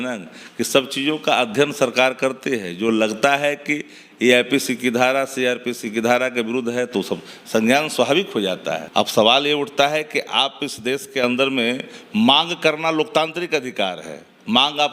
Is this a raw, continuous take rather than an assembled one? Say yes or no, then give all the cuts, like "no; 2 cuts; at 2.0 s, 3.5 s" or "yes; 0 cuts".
no; 1 cut; at 8.8 s